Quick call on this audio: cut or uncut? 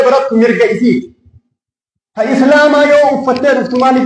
uncut